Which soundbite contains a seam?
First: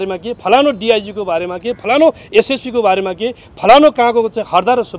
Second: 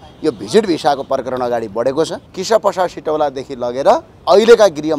second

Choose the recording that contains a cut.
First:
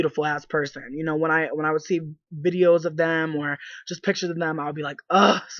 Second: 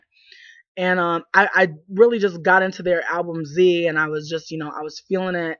first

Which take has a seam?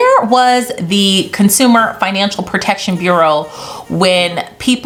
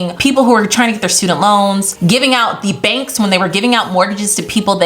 second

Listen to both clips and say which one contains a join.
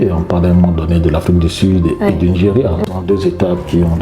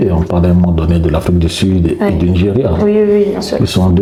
first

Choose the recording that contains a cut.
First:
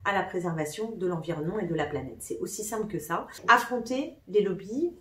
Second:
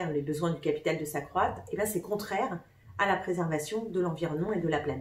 first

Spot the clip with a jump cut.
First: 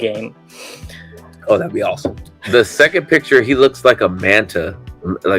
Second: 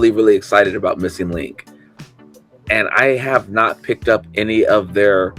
first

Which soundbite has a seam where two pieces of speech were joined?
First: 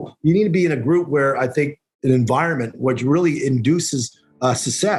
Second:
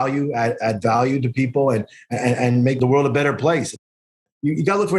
second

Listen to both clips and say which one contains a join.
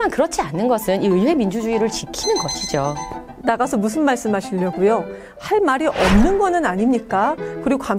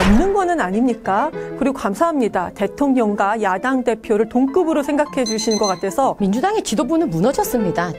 second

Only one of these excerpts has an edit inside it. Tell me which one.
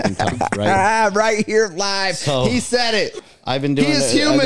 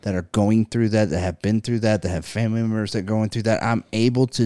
first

